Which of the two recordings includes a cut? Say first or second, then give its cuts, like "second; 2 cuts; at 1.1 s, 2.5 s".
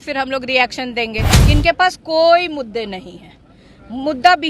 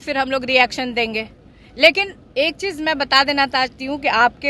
first; 1 cut; at 1.3 s